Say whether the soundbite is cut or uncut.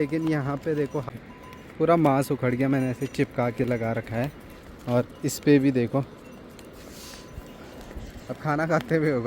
cut